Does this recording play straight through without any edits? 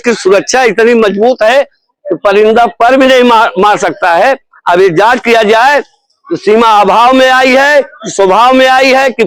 yes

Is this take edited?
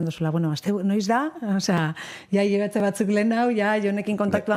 no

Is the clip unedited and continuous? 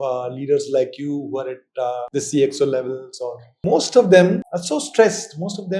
no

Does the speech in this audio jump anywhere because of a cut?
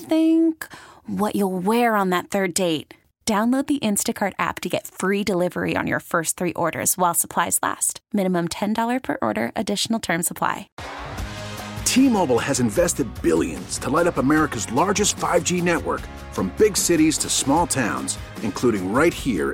yes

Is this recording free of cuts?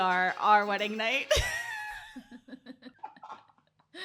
no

